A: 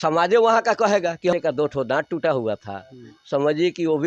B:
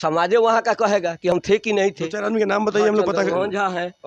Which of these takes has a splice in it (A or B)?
A